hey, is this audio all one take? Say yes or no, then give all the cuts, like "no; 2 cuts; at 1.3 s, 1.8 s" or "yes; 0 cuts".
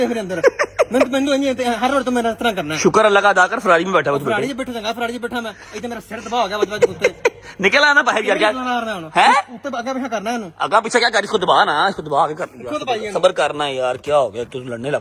yes; 0 cuts